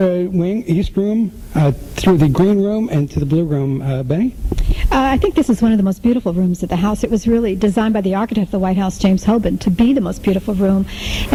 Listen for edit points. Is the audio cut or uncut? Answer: uncut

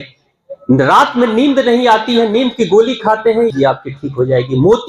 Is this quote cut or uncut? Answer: cut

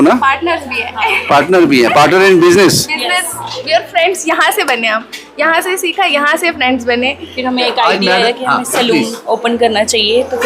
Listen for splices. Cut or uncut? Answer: uncut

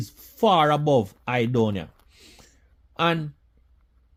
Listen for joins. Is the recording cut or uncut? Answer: uncut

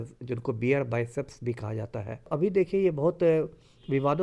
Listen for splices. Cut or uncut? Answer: cut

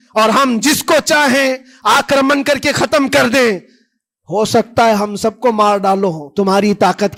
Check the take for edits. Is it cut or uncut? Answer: uncut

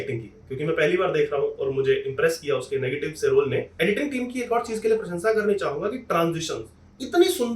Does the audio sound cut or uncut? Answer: cut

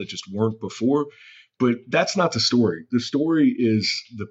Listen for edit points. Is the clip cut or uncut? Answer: uncut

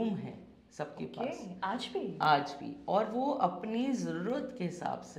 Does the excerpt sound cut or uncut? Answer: uncut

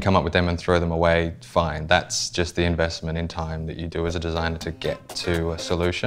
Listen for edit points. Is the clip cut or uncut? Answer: uncut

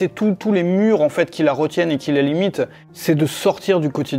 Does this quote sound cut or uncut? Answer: cut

